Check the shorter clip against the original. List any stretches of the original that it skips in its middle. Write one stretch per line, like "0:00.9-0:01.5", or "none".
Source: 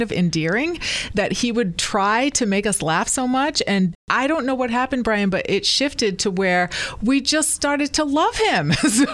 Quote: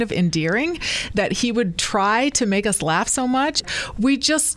0:03.6-0:06.7